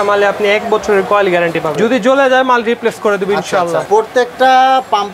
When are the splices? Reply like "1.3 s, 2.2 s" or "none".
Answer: 3.8 s